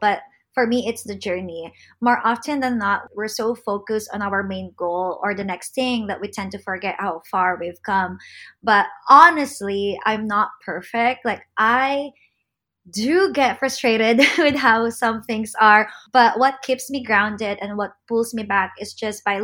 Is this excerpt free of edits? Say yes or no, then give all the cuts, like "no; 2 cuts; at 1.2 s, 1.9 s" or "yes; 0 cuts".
no; 2 cuts; at 3.0 s, 16.0 s